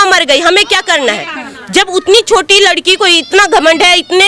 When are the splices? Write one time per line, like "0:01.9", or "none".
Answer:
none